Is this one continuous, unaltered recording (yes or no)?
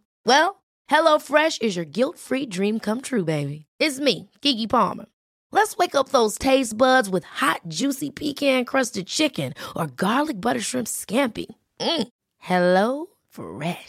yes